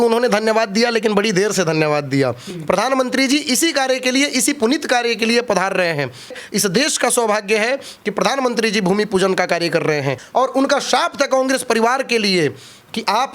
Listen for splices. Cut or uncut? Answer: cut